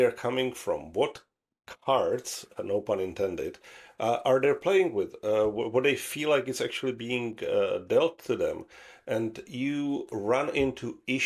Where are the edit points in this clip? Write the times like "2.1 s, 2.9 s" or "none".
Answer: none